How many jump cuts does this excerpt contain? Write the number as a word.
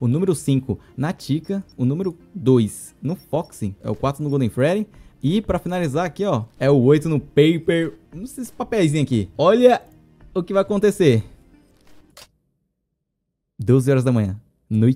four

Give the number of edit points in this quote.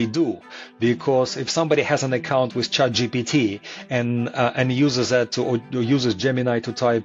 zero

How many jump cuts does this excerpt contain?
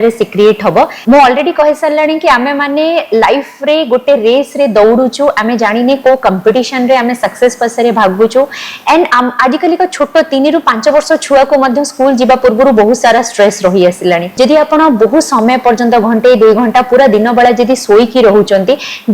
two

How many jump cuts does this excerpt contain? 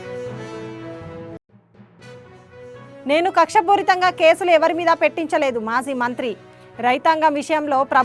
two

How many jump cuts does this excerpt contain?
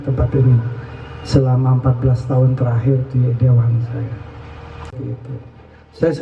one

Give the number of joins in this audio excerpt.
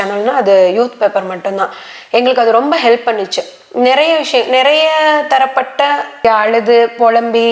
one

